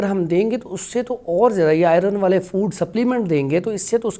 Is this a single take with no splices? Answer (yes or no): yes